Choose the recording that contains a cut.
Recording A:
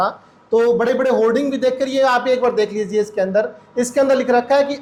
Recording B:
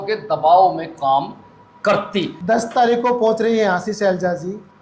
B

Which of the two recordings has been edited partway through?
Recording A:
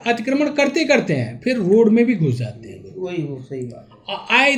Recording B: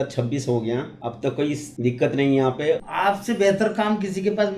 B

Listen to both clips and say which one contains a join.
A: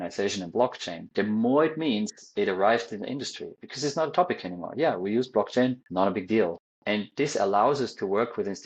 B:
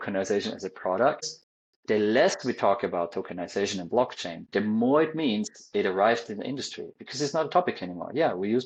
B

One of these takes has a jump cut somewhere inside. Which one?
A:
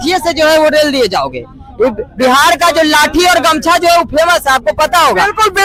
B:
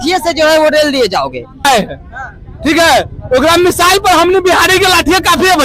B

